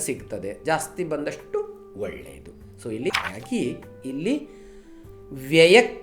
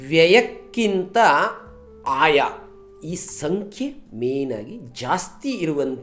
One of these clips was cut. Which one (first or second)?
first